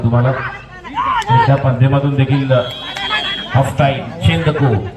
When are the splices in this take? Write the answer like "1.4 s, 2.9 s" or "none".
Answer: none